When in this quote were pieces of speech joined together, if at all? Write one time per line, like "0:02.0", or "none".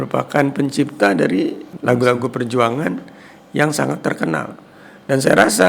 0:01.7